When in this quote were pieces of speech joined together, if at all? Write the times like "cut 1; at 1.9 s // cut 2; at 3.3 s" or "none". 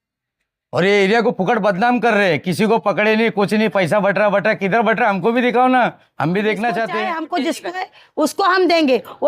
cut 1; at 6.9 s